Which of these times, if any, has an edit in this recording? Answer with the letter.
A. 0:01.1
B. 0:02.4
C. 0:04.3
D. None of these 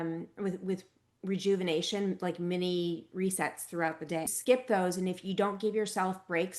C